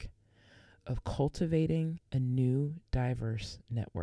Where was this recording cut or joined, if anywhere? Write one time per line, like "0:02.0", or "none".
0:02.0